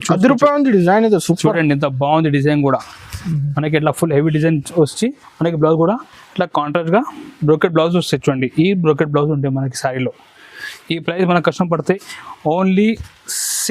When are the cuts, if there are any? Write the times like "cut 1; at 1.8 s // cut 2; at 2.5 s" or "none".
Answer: none